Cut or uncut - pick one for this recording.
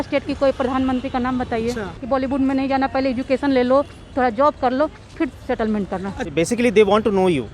cut